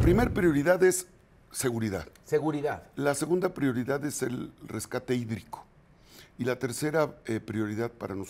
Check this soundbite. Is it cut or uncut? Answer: uncut